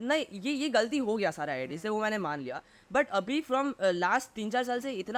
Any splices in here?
no; 0 cuts

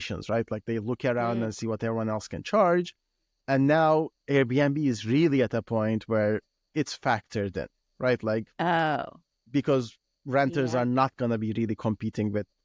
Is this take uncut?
yes; 0 cuts

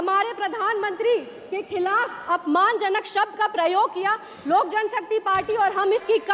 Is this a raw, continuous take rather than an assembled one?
yes; 0 cuts

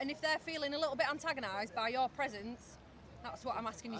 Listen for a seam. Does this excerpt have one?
no; 0 cuts

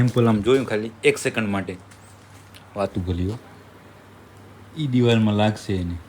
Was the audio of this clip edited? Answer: no; 0 cuts

